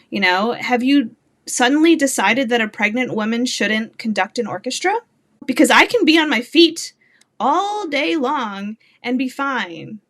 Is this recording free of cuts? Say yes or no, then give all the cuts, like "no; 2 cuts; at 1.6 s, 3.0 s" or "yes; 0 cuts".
no; 1 cut; at 5.4 s